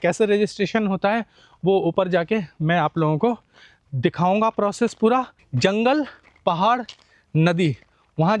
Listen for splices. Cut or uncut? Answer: cut